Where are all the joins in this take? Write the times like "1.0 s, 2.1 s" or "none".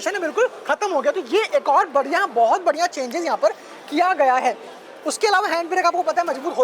none

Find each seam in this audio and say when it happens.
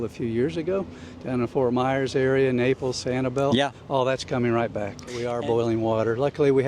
5.2 s

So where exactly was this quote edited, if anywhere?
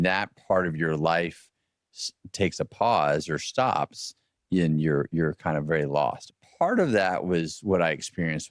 6.2 s

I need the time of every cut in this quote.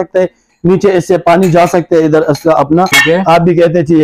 3.0 s

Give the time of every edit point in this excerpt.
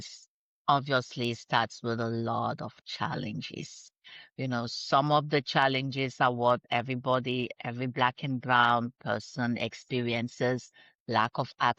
none

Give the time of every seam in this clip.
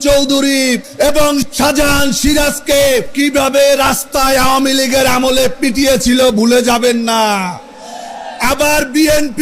1.2 s, 3.1 s

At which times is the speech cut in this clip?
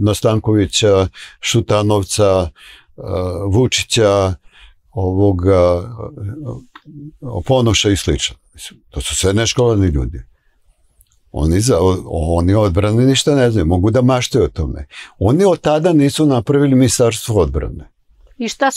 none

